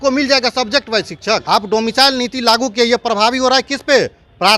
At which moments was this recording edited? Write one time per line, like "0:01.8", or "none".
0:01.4